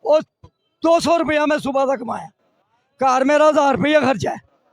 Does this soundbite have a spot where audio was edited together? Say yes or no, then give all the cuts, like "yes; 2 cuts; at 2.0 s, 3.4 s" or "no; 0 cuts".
no; 0 cuts